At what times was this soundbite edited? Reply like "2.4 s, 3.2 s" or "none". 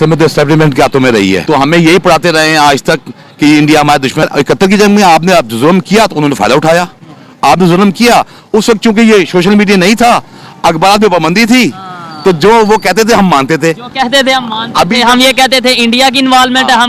1.4 s, 4.3 s